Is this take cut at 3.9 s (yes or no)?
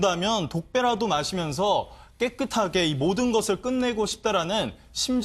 yes